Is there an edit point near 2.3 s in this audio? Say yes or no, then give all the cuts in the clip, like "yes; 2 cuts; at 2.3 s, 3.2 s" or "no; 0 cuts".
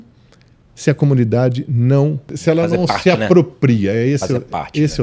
yes; 1 cut; at 2.3 s